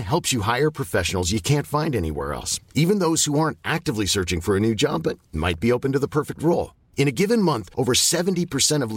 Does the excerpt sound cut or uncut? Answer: uncut